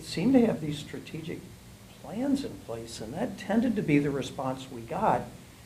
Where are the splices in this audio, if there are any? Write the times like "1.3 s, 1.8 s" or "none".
none